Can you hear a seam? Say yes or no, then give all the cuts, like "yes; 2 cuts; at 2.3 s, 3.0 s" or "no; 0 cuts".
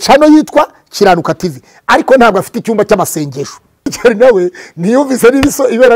yes; 1 cut; at 3.9 s